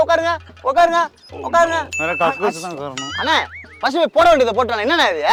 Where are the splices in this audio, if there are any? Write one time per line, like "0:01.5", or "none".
none